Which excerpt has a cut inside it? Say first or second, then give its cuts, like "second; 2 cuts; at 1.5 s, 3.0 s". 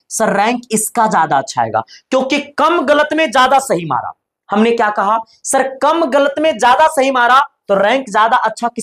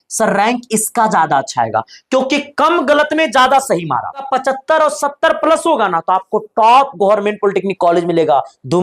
second; 1 cut; at 4.3 s